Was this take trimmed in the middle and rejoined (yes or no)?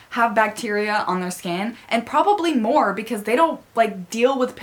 no